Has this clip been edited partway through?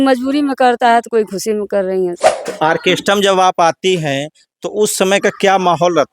yes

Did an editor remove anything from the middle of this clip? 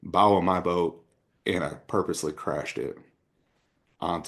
no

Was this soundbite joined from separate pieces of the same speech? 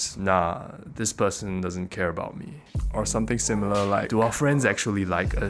no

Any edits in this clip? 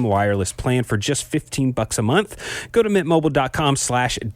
no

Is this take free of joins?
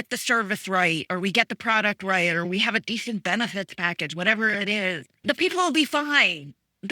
no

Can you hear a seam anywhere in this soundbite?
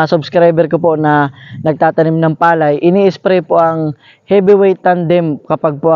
no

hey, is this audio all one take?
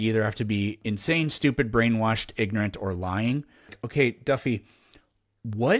no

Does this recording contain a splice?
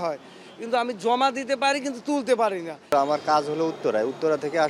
yes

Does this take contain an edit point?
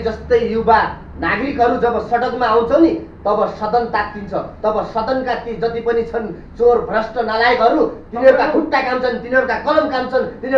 no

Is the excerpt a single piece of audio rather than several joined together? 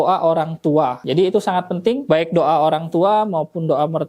no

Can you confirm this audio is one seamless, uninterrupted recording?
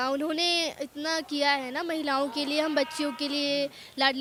yes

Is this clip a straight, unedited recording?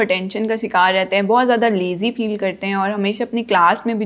yes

